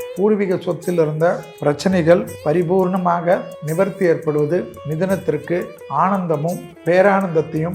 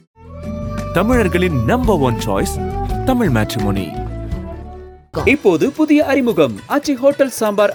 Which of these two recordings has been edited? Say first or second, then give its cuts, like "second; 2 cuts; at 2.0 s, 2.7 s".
first; 6 cuts; at 1.5 s, 2.3 s, 3.6 s, 4.8 s, 5.8 s, 6.7 s